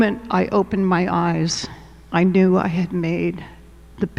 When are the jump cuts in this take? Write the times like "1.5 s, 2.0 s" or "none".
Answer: none